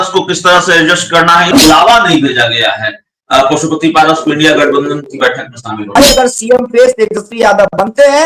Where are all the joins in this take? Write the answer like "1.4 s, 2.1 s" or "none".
1.6 s, 5.9 s